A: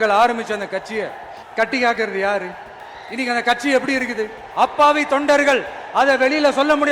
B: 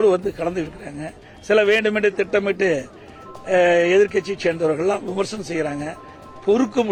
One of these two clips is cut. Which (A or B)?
A